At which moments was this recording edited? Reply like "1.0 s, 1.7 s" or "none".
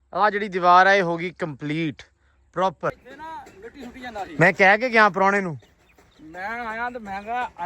3.1 s

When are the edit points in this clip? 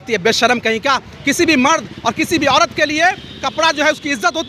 none

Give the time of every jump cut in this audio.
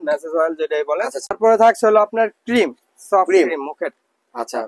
1.3 s

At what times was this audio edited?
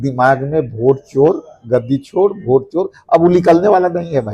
none

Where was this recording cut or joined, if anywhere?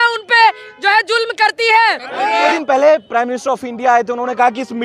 2.5 s

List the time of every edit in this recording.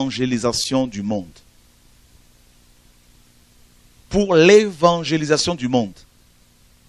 none

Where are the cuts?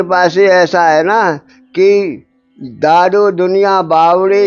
none

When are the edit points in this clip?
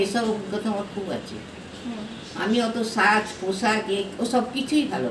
none

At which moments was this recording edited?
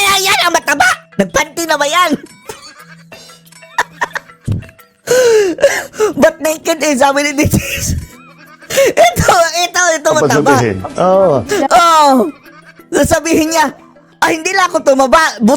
none

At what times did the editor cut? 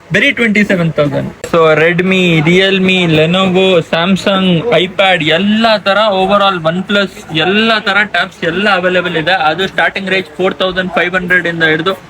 1.4 s

